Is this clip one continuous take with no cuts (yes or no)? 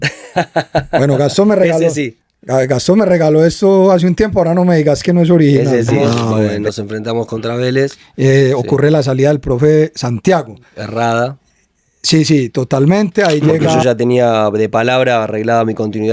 no